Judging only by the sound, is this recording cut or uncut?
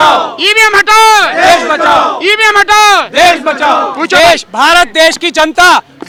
uncut